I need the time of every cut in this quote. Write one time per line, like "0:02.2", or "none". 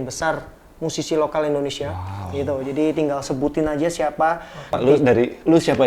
0:04.7